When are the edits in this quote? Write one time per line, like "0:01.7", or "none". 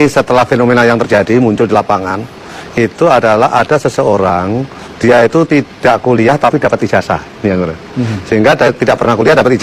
none